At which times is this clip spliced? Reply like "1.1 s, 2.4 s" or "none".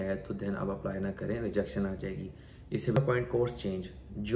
3.0 s